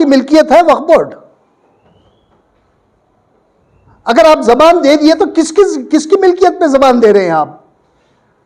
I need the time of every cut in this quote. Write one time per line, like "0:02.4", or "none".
none